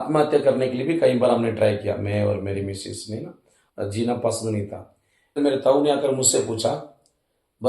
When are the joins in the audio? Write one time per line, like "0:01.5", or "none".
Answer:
0:05.4